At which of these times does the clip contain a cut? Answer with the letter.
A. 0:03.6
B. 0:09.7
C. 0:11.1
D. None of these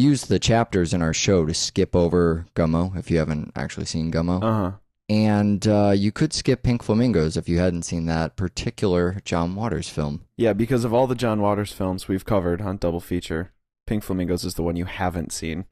B